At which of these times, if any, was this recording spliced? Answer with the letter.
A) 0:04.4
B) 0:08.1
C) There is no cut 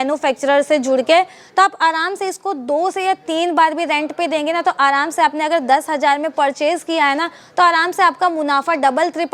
C